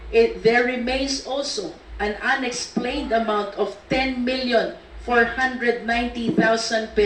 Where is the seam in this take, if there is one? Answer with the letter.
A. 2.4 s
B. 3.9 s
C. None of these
C